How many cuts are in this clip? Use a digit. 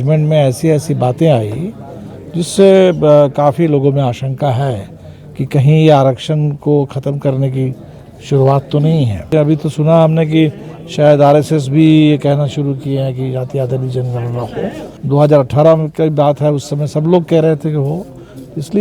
2